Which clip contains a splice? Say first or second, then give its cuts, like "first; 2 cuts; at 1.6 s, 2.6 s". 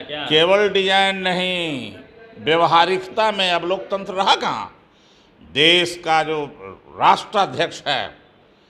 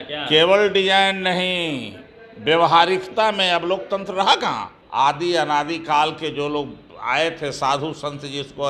second; 1 cut; at 4.8 s